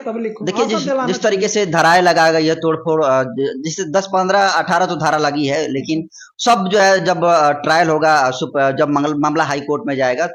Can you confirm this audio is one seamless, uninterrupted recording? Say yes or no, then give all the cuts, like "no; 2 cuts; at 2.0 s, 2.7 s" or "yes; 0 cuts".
yes; 0 cuts